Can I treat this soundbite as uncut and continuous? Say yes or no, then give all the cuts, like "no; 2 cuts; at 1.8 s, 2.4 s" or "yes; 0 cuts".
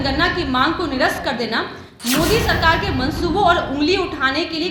yes; 0 cuts